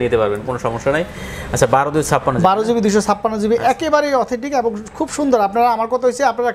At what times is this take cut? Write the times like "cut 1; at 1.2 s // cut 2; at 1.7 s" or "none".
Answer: none